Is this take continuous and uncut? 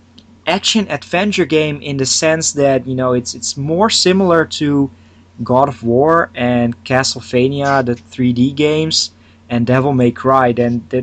no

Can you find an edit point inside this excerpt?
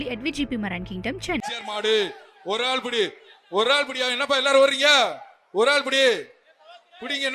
yes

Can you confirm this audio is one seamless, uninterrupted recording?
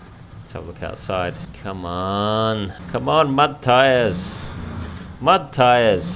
no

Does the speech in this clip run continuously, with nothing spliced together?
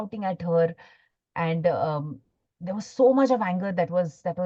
yes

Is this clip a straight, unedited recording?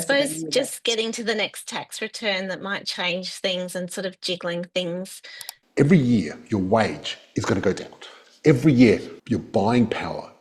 no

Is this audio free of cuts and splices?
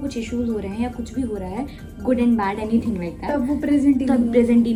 yes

